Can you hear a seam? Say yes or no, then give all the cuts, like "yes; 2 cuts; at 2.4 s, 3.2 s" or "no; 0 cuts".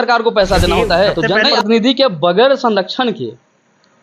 yes; 1 cut; at 1.4 s